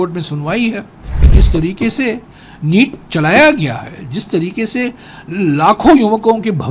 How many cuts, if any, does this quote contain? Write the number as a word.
one